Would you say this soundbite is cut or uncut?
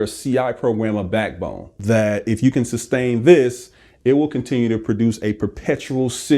cut